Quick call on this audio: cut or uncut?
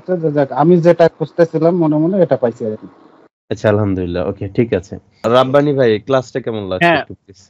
cut